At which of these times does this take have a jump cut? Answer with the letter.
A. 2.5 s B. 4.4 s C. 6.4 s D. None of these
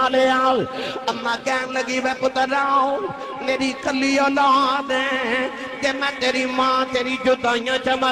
D